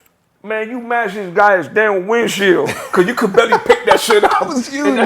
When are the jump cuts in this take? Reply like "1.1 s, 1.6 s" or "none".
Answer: 2.8 s